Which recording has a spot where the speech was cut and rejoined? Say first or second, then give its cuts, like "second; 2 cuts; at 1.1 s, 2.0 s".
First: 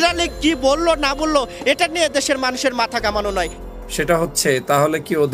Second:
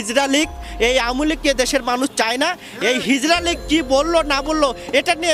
first; 1 cut; at 3.6 s